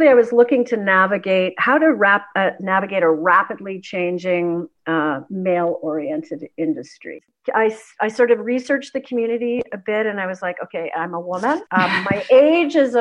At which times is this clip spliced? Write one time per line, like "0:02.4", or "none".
0:07.2
0:11.7